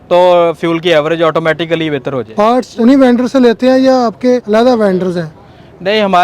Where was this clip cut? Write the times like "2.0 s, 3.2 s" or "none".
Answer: 2.5 s, 4.4 s